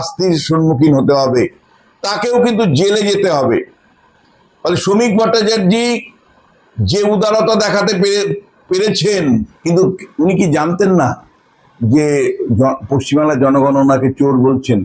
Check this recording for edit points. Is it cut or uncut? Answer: cut